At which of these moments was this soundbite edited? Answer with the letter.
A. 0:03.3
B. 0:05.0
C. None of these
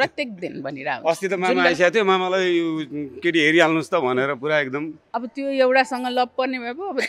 B